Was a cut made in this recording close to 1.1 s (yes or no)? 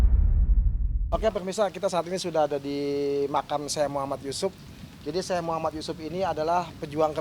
yes